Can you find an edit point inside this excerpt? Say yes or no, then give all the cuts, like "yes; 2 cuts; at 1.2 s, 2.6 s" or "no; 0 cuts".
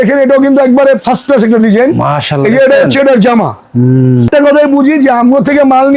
yes; 1 cut; at 4.3 s